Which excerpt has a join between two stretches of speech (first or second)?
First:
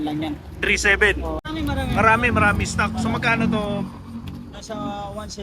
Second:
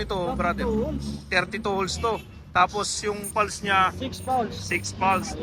first